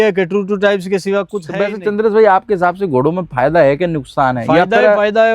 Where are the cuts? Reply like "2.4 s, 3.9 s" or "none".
1.4 s